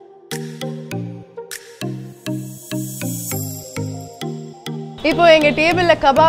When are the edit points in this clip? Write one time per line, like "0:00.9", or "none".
0:04.9